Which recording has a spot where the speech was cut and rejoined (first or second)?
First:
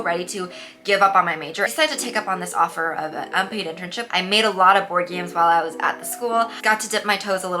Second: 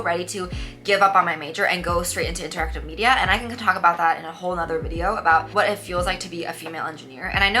first